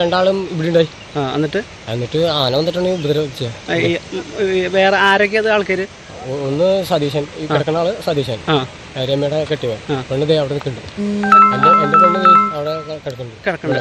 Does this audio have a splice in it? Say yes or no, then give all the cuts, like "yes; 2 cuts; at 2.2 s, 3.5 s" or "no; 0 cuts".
no; 0 cuts